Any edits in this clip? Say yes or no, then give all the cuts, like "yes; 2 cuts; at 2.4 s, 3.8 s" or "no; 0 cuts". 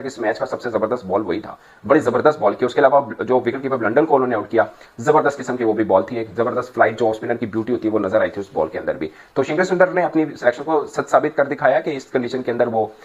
no; 0 cuts